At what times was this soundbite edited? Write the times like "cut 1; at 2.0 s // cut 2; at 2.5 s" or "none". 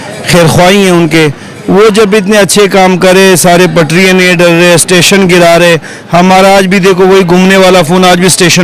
none